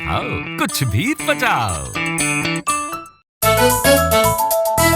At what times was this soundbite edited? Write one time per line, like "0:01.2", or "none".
0:03.3